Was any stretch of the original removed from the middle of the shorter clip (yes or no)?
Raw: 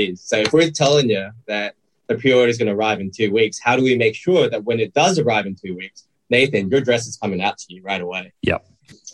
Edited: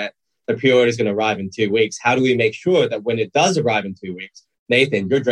no